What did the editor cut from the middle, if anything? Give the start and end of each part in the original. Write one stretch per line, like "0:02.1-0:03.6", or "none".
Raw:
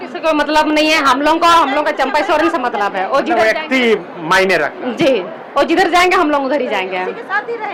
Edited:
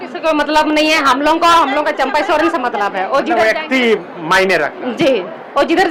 none